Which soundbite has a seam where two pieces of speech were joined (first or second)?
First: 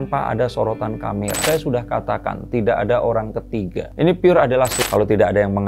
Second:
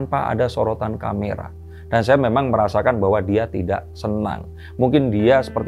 first